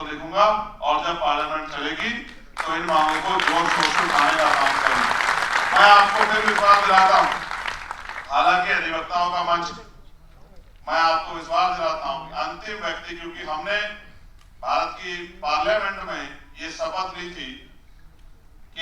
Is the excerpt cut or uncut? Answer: uncut